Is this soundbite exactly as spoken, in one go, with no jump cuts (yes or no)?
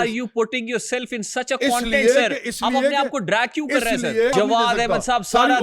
no